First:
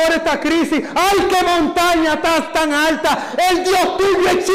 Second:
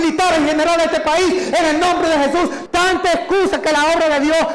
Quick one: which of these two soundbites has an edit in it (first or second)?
second